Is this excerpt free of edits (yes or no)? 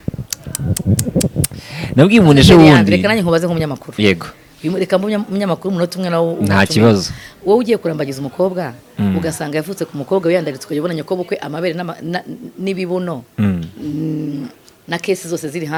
yes